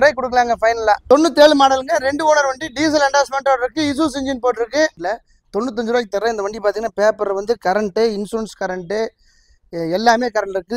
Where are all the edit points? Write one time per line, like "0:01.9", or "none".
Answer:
0:01.0
0:05.0